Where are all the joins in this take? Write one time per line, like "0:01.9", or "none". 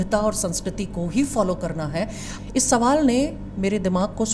0:02.2